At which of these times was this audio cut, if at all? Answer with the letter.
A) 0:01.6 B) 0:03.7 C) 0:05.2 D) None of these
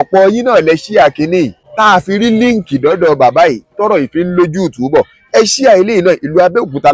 A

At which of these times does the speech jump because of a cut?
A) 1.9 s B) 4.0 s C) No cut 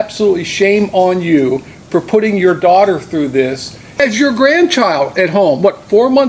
B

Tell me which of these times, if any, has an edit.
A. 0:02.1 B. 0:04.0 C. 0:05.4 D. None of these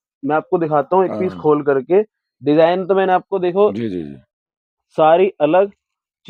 D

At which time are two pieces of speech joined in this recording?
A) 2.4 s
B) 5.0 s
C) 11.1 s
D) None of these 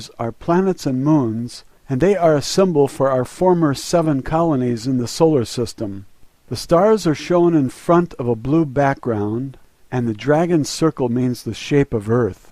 C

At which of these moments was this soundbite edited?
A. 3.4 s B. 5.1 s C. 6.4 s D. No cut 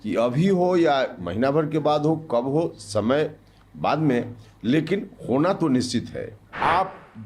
C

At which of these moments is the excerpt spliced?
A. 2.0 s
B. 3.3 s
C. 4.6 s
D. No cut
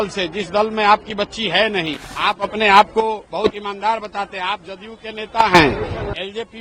A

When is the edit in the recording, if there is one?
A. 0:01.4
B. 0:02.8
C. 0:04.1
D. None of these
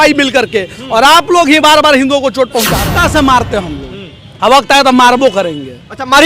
B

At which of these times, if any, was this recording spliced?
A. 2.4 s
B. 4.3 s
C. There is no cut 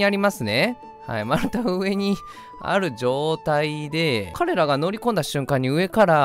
B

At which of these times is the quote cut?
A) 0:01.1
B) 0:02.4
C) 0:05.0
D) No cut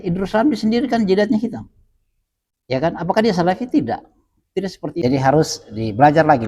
C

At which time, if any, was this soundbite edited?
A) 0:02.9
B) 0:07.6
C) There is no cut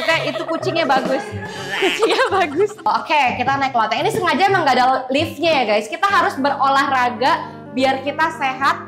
A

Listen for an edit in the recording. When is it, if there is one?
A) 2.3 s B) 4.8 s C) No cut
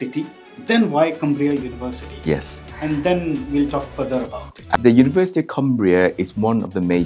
B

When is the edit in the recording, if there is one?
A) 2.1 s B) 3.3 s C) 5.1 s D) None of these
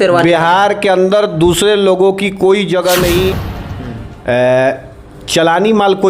B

